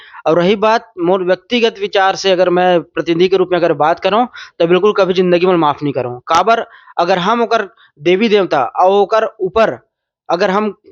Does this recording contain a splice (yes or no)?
no